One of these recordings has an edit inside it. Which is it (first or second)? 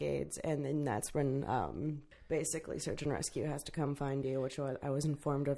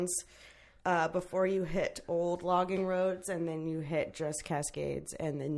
first